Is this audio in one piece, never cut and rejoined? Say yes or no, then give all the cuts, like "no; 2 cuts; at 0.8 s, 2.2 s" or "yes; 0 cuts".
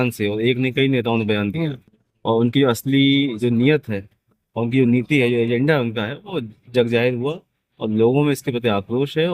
yes; 0 cuts